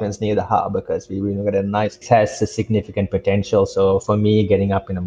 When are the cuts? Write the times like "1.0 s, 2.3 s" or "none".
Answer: 2.0 s